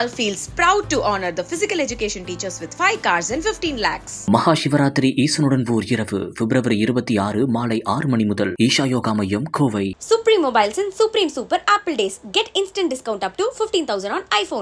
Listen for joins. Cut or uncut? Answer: uncut